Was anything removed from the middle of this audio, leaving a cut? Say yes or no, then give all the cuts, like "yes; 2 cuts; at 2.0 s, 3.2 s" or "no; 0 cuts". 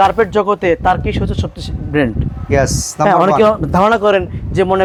no; 0 cuts